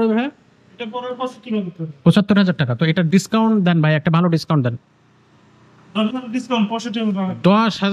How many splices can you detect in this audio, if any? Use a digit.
0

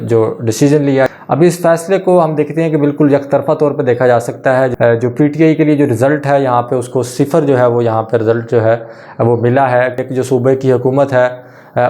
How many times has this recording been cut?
3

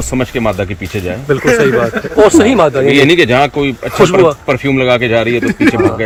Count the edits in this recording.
0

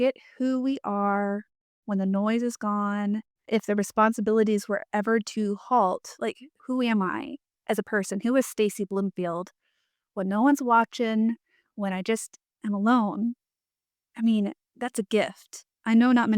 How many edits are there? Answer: 1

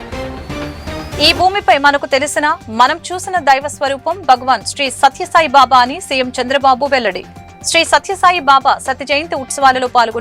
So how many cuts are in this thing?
0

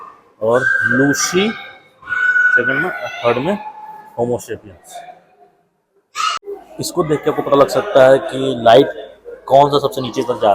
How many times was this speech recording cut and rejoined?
1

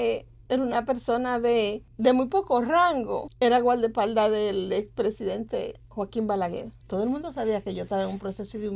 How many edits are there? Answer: 3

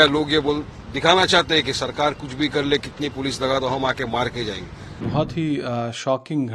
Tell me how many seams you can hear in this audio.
1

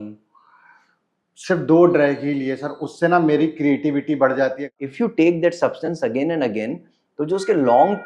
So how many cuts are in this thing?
1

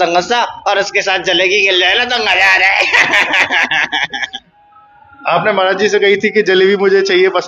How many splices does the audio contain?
0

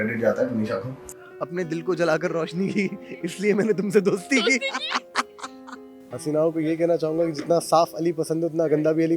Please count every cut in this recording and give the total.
2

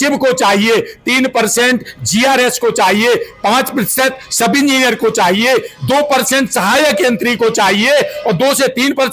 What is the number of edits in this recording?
0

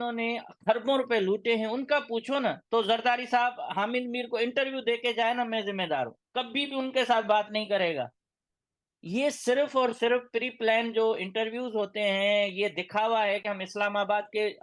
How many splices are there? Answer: 0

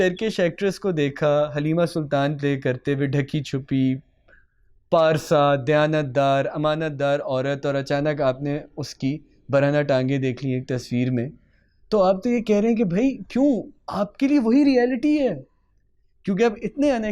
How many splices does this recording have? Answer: 0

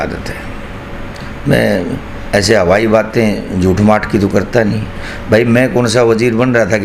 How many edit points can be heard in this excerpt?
0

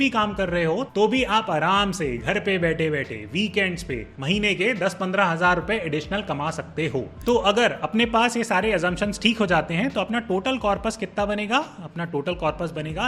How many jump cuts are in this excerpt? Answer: 2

